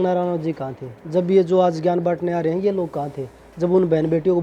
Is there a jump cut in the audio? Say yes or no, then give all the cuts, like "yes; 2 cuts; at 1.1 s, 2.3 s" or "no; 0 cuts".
no; 0 cuts